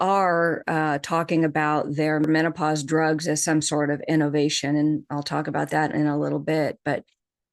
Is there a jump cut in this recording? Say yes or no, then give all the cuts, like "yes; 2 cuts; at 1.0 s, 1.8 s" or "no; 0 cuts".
yes; 1 cut; at 2.3 s